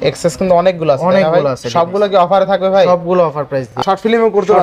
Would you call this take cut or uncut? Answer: cut